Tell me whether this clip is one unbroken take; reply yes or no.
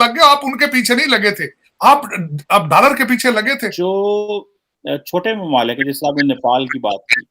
no